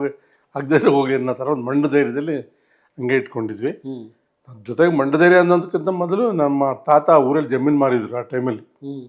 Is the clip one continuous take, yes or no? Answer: yes